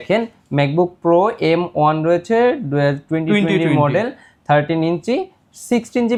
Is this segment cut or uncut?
uncut